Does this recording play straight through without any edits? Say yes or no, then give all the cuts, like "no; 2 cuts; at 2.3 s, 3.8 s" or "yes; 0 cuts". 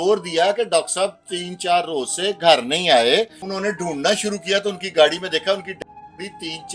no; 1 cut; at 3.4 s